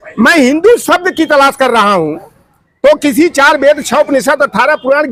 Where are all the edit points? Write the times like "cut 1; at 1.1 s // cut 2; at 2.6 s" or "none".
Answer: none